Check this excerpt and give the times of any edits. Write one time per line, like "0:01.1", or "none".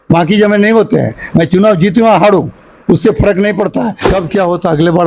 0:04.0